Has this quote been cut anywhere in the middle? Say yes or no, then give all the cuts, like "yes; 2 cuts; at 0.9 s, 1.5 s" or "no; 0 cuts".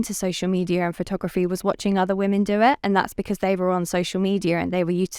no; 0 cuts